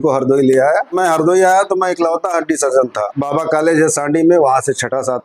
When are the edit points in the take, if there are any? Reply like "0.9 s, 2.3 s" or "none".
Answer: 1.0 s, 3.1 s